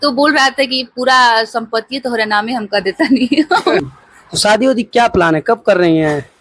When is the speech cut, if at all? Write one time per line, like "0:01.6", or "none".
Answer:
0:03.8

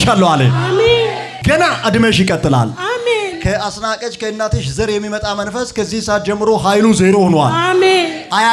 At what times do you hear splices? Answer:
none

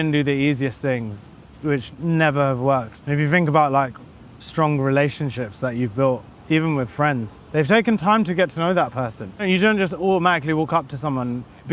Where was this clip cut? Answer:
0:03.0
0:09.4

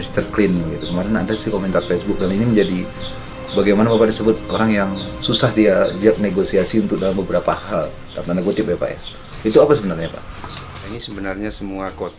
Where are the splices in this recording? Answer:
0:10.9

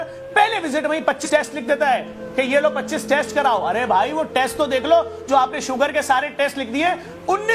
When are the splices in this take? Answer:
0:01.2

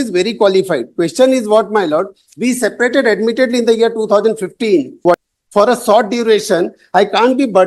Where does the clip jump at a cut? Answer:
0:05.2

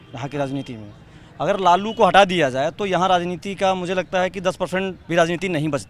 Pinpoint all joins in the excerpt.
0:05.0

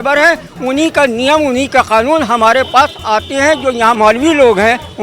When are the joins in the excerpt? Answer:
0:03.9

